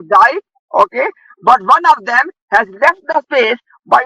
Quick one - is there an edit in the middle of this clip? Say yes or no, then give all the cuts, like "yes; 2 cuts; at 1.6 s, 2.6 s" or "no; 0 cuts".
no; 0 cuts